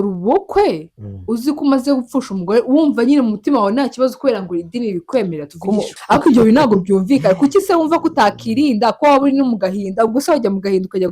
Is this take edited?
yes; 1 cut; at 6.0 s

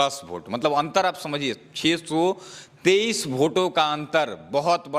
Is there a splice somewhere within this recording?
no; 0 cuts

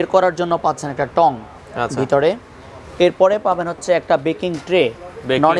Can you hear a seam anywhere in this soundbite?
no; 0 cuts

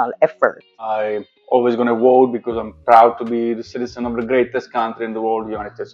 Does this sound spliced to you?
yes; 1 cut; at 0.9 s

